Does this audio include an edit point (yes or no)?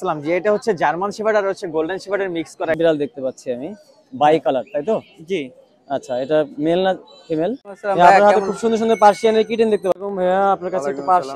yes